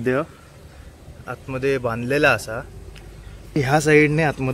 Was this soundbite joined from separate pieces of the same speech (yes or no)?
yes